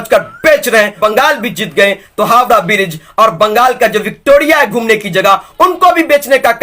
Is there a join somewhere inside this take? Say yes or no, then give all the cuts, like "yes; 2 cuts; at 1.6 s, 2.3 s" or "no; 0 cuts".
yes; 1 cut; at 1.0 s